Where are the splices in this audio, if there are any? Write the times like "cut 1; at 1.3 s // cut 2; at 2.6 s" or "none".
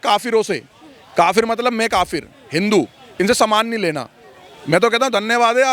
none